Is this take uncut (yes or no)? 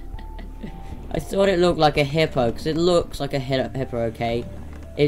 yes